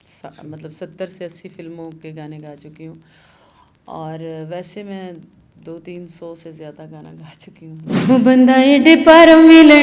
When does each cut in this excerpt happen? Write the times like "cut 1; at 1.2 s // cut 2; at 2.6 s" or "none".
cut 1; at 7.9 s